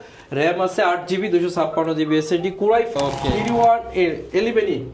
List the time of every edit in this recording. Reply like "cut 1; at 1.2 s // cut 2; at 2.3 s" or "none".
cut 1; at 2.9 s